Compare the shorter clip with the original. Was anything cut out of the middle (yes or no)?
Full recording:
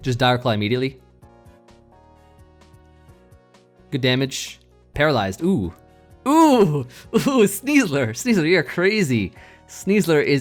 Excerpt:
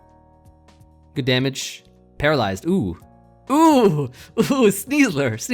yes